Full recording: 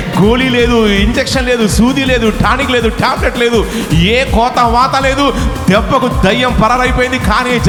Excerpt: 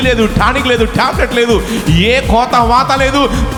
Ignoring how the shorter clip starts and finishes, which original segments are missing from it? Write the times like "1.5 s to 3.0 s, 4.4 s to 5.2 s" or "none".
none